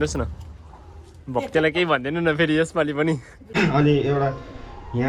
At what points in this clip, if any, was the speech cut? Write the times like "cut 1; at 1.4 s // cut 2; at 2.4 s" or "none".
cut 1; at 3.4 s